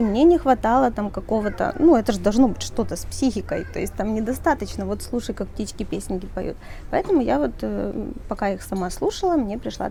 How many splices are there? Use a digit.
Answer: 0